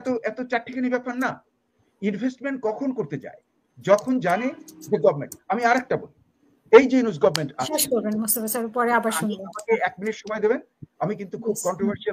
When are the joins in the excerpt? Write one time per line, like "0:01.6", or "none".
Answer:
none